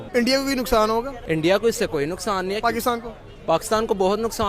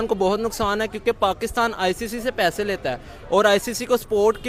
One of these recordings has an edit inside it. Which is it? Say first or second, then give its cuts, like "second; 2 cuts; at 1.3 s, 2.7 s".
first; 1 cut; at 1.2 s